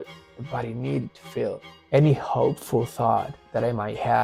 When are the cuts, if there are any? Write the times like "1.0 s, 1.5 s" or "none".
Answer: 1.7 s